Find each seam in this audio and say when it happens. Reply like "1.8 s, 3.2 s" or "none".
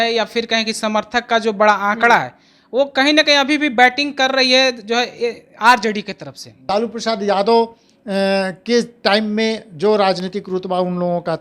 6.5 s